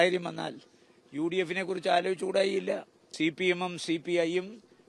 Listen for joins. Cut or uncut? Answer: cut